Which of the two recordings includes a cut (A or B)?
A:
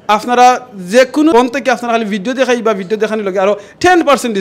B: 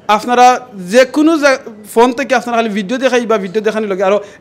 A